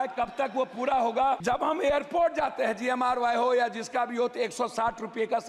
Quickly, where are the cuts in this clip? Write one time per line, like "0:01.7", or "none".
0:01.4